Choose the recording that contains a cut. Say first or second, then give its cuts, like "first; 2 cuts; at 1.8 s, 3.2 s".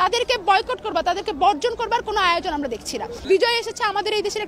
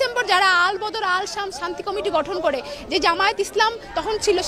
first; 1 cut; at 3.2 s